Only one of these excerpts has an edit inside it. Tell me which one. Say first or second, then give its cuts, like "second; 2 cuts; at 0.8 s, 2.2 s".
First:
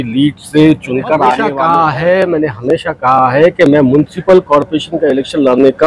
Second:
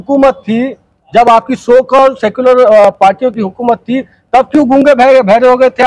first; 1 cut; at 1.6 s